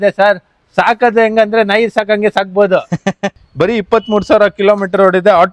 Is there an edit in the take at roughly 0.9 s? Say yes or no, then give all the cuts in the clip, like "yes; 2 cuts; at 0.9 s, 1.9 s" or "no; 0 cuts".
no; 1 cut; at 3.2 s